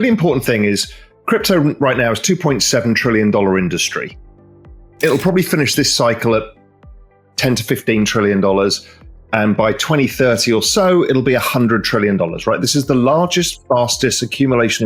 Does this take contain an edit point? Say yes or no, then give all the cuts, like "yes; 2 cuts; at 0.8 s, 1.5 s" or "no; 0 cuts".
no; 0 cuts